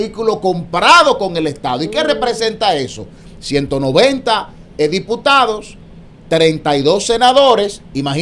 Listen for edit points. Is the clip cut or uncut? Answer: uncut